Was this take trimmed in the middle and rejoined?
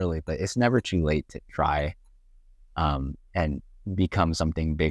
no; 0 cuts

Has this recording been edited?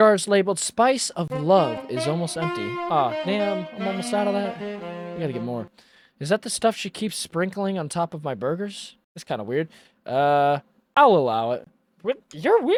no; 0 cuts

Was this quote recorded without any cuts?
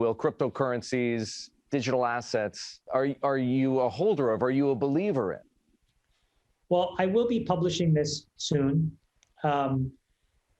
no; 1 cut; at 2.7 s

